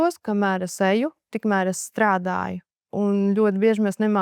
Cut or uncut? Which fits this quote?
cut